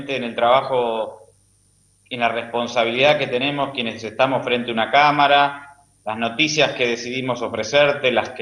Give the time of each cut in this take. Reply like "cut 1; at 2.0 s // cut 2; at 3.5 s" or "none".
cut 1; at 3.9 s